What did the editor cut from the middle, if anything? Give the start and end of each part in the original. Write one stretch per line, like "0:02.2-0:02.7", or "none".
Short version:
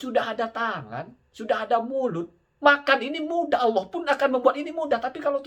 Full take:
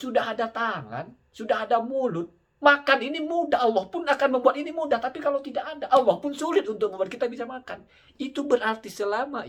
none